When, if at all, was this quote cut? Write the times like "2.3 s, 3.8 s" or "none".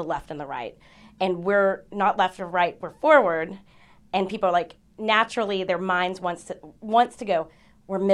none